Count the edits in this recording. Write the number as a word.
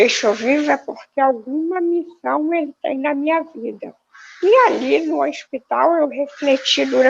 zero